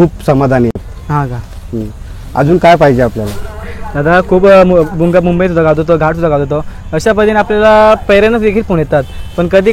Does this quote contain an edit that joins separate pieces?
no; 0 cuts

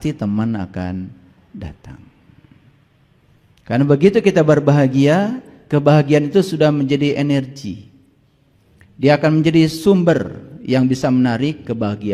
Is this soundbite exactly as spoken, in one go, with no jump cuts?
yes; 0 cuts

